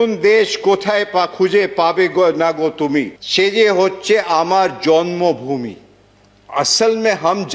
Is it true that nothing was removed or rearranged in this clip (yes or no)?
no